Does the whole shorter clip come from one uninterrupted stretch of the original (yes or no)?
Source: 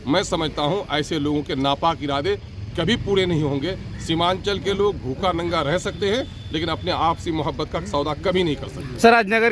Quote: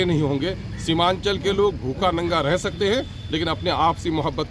yes